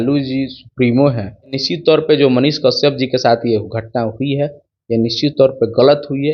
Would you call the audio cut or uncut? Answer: cut